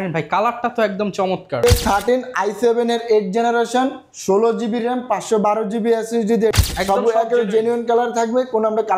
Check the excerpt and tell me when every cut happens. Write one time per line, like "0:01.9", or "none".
0:01.6
0:06.6

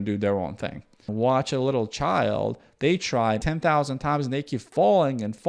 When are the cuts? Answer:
0:01.1
0:03.4

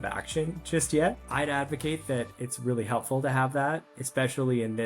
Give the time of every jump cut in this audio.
0:01.2

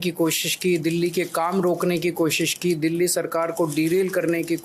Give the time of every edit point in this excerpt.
none

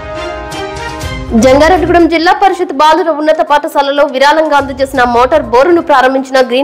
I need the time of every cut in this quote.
0:01.2

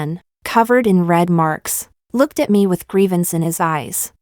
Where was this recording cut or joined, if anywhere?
none

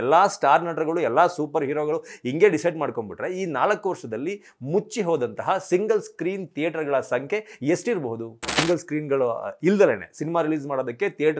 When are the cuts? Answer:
0:08.4

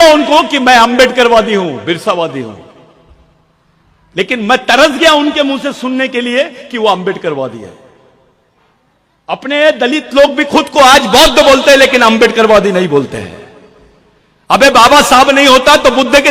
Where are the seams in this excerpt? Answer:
none

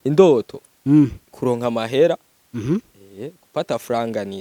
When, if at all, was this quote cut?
0:01.2

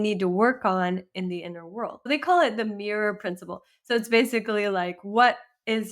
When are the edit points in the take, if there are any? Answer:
0:02.1

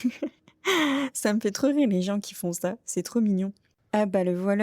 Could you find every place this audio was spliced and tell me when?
0:03.6

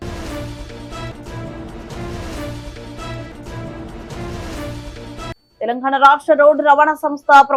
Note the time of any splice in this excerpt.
none

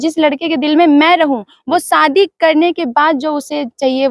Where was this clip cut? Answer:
none

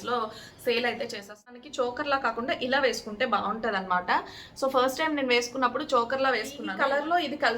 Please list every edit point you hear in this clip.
0:01.6
0:06.6

